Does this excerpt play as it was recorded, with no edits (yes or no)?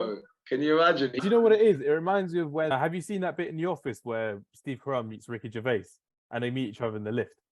no